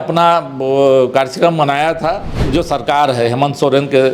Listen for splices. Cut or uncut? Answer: cut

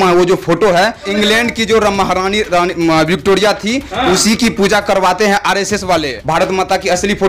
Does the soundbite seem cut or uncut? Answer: cut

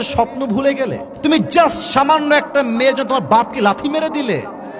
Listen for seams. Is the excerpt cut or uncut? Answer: cut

